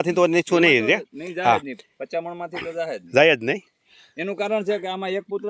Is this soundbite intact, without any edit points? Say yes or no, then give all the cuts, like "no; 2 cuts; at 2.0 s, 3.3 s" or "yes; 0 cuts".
yes; 0 cuts